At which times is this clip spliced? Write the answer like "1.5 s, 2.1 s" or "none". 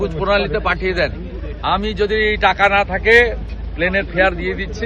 none